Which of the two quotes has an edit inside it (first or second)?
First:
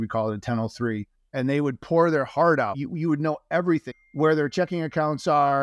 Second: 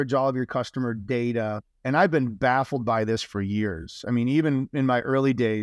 first